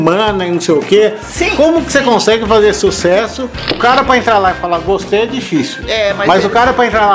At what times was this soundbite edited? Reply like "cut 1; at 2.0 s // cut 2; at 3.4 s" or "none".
cut 1; at 3.8 s